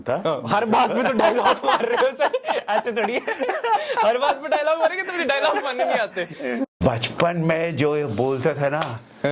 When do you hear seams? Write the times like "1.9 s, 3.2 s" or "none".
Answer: 6.8 s